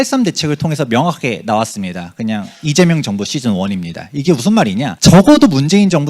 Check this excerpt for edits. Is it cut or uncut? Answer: cut